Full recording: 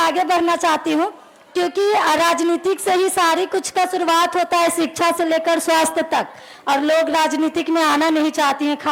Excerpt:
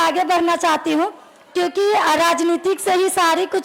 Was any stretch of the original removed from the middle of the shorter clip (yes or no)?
no